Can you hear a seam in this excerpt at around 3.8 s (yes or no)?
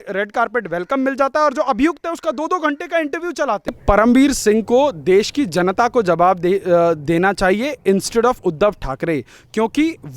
yes